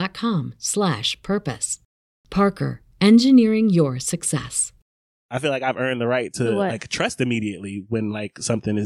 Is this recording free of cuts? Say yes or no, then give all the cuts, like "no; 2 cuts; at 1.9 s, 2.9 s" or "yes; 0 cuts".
no; 1 cut; at 5.2 s